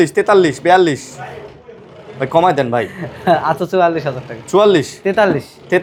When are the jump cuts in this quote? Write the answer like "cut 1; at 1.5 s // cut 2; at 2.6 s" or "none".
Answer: none